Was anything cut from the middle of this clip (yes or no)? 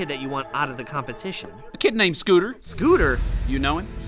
no